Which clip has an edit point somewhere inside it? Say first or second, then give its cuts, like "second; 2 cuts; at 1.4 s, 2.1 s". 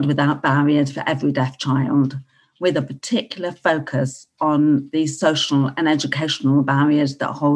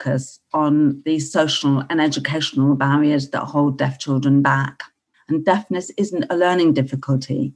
second; 1 cut; at 5.1 s